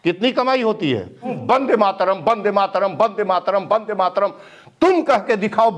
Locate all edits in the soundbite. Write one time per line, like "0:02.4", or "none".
0:01.4

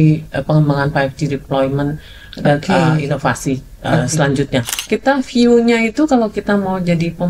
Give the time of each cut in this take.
0:04.7

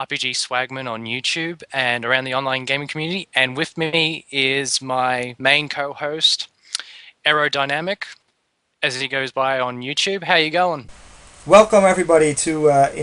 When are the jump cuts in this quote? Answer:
none

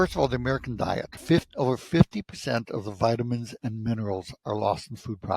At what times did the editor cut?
0:01.1

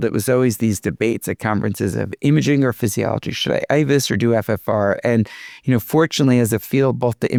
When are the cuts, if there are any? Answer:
none

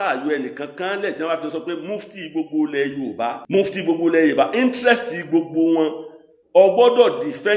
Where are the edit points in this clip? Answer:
0:03.4

